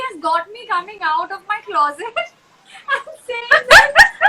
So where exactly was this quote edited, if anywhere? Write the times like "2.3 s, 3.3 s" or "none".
none